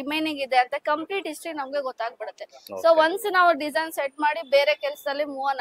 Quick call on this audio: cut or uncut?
uncut